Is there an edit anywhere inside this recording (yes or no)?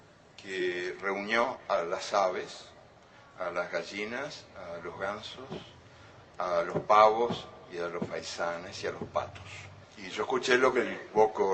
yes